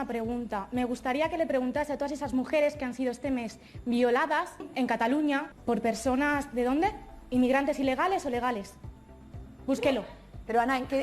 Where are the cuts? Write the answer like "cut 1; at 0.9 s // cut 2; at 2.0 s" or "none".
none